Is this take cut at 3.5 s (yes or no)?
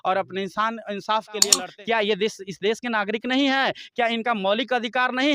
no